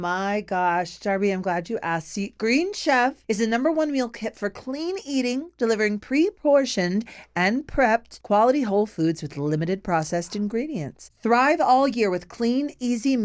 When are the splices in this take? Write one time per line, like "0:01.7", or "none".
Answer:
0:11.0